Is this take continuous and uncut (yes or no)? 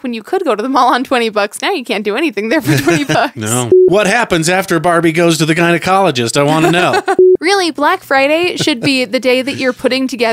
no